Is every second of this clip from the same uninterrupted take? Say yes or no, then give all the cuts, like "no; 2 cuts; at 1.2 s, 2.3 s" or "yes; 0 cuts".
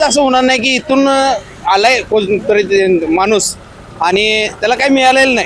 yes; 0 cuts